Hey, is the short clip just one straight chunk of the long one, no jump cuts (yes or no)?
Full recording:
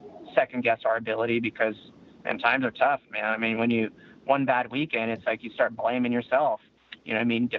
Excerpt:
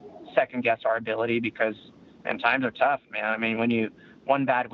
yes